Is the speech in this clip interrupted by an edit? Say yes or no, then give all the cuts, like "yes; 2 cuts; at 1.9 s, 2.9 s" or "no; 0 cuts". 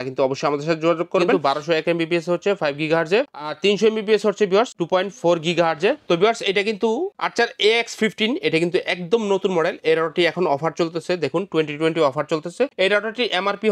yes; 2 cuts; at 1.3 s, 6.0 s